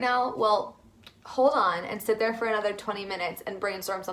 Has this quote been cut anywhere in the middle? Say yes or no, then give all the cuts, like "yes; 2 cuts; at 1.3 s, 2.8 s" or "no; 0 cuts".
no; 0 cuts